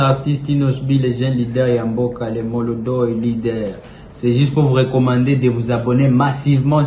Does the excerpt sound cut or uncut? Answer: uncut